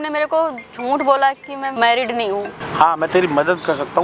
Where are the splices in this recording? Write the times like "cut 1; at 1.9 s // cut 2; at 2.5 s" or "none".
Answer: cut 1; at 1.7 s // cut 2; at 2.5 s